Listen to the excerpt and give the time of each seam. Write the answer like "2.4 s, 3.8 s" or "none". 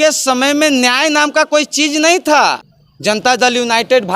3.2 s